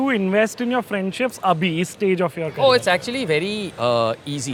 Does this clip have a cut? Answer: no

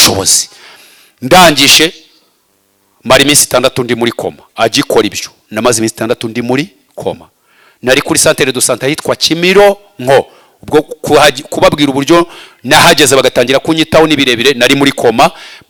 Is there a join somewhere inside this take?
no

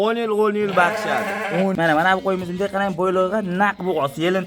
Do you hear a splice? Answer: yes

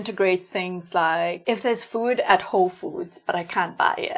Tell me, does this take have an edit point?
yes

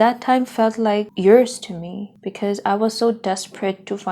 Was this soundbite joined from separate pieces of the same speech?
yes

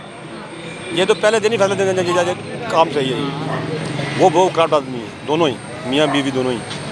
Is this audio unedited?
yes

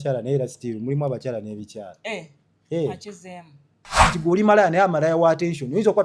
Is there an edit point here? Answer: yes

